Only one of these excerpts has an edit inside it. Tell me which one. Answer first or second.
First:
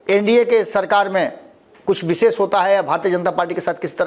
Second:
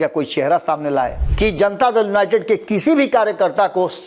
second